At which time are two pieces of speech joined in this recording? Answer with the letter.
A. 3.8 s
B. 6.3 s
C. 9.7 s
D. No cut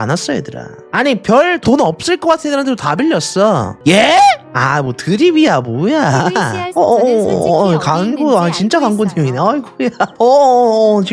A